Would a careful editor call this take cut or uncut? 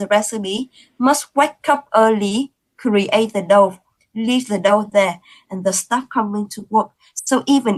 uncut